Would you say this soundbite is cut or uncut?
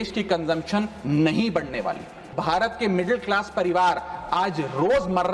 cut